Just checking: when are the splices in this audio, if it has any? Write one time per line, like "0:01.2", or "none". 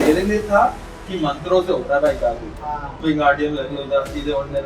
0:02.5